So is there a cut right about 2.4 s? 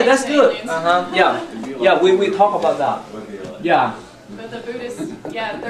yes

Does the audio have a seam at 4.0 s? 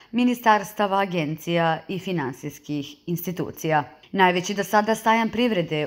yes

